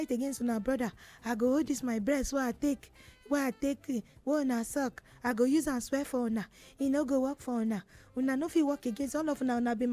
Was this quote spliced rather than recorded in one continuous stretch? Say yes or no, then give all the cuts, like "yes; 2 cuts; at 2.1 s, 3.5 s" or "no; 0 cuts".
no; 0 cuts